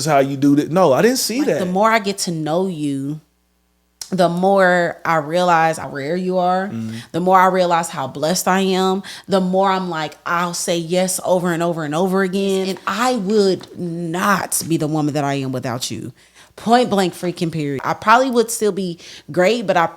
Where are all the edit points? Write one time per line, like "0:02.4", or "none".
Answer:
0:01.6
0:05.9
0:12.8
0:17.8

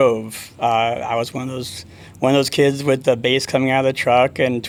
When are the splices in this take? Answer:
none

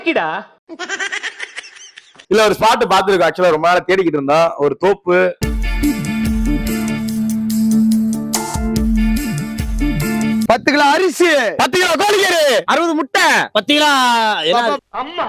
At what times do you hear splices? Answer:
0:02.2
0:05.4
0:10.4

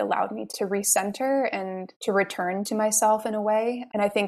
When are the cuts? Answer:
none

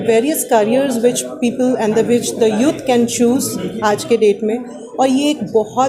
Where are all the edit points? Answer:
none

